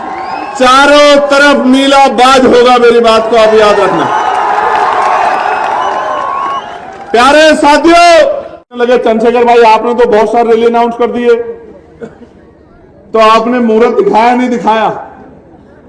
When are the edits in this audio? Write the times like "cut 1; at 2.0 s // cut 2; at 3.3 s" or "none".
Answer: cut 1; at 8.7 s